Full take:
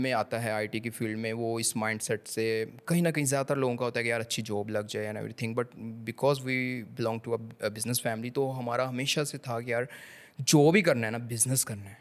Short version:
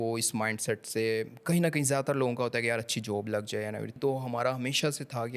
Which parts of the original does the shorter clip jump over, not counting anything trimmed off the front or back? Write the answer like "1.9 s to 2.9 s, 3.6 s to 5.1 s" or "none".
5.4 s to 8.3 s